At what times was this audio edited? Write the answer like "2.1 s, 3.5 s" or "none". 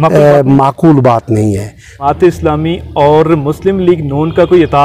2.0 s